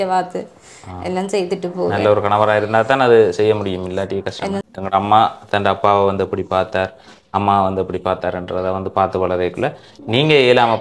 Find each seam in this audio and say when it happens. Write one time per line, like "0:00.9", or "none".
0:04.6